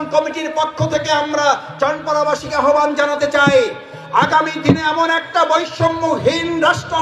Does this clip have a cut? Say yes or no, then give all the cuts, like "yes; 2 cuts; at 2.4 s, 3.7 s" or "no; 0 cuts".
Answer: no; 0 cuts